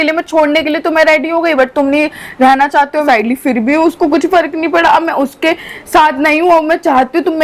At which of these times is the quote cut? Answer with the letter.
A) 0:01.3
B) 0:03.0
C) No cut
B